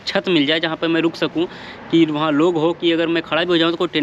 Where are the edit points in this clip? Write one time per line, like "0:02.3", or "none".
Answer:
none